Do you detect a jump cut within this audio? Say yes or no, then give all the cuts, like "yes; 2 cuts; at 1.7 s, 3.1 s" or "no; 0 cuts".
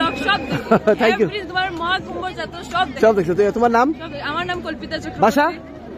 no; 0 cuts